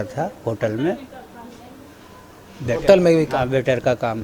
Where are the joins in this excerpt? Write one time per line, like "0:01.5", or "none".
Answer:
none